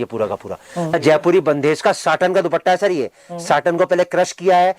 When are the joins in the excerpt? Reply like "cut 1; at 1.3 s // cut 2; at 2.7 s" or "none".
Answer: cut 1; at 0.9 s